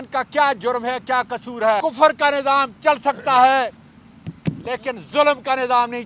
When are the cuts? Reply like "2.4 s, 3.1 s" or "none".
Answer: 1.8 s